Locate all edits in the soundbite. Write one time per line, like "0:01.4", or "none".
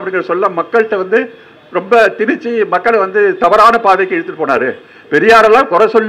none